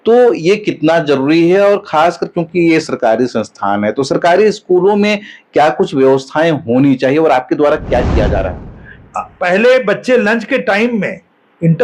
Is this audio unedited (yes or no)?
no